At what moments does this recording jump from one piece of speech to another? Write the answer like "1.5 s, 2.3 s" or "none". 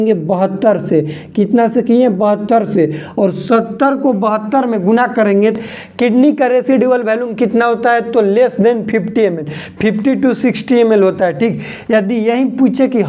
5.6 s